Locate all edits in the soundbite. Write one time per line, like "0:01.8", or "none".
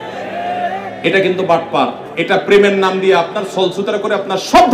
0:02.0